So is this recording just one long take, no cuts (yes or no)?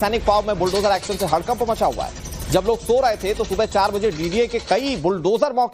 no